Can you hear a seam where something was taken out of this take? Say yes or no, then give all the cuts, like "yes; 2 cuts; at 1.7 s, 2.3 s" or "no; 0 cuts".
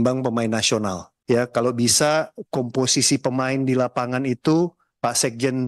yes; 1 cut; at 1.1 s